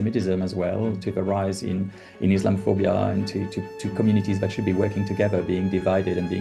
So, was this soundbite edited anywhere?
no; 0 cuts

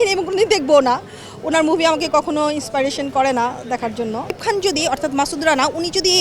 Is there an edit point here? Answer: yes; 1 cut; at 4.4 s

